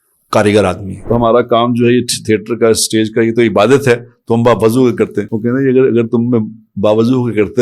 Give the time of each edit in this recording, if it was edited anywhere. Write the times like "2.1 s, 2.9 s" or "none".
0.9 s, 5.3 s